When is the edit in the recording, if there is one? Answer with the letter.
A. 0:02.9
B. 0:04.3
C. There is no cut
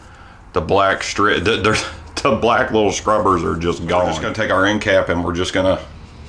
B